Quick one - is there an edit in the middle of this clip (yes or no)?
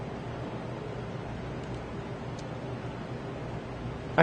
no